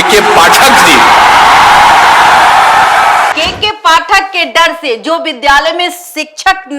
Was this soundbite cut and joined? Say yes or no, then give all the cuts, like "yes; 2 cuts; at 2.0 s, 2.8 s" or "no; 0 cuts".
yes; 1 cut; at 3.4 s